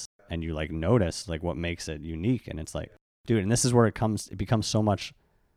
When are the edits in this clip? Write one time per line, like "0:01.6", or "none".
none